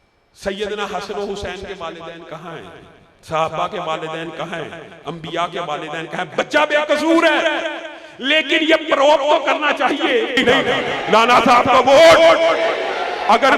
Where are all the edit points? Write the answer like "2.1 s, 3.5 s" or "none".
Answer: 10.4 s